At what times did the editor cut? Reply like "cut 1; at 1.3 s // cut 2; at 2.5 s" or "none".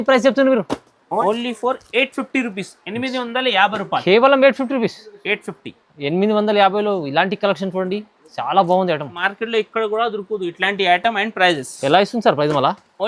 cut 1; at 1.2 s // cut 2; at 9.2 s